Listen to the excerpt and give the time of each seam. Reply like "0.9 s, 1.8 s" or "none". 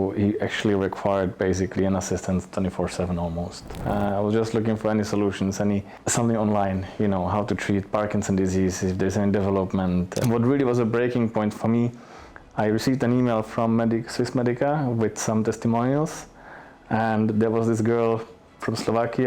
3.8 s, 6.0 s, 10.2 s